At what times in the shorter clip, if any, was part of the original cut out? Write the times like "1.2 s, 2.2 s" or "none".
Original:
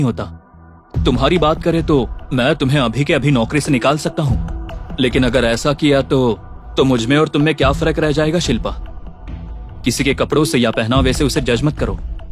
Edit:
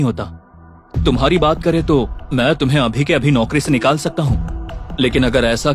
none

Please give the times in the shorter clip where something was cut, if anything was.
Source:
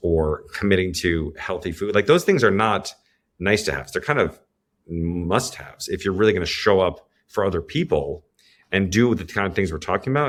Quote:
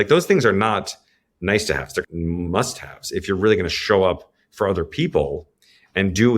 2.1 s

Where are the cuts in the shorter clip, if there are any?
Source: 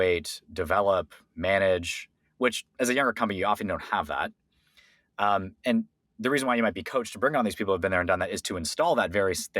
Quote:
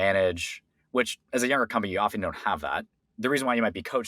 3.0 s

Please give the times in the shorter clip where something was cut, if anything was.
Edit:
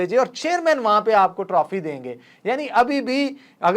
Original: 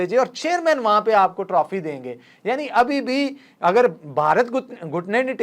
none

